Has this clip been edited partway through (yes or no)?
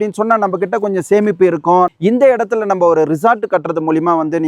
yes